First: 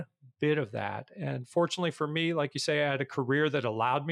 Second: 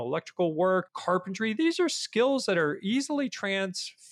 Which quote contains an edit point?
second; 1 cut; at 0.9 s

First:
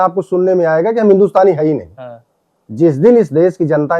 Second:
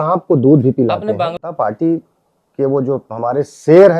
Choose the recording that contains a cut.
second; 1 cut; at 1.4 s

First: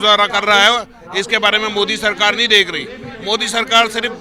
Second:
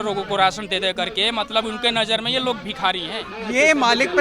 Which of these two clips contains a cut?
second; 1 cut; at 3.3 s

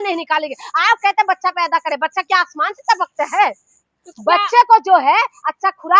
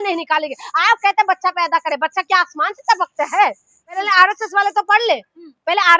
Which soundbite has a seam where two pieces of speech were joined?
second; 1 cut; at 4.0 s

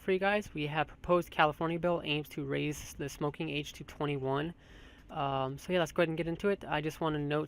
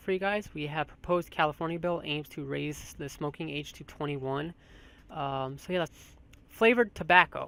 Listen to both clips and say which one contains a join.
first; 1 cut; at 5.9 s

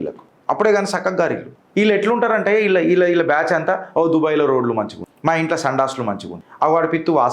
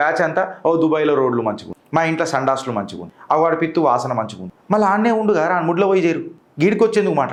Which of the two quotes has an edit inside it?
first; 1 cut; at 1.5 s

